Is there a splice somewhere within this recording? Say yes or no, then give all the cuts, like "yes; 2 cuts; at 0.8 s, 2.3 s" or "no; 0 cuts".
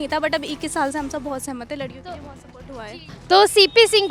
no; 0 cuts